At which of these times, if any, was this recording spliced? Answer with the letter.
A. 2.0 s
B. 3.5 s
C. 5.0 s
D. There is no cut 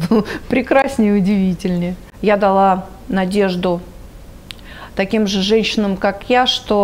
A